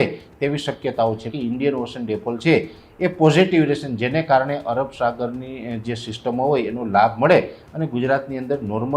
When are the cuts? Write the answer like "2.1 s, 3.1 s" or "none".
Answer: 1.3 s